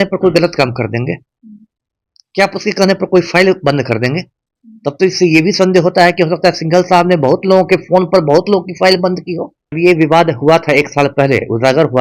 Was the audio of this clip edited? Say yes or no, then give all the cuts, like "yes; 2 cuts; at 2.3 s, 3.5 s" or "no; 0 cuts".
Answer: yes; 1 cut; at 9.8 s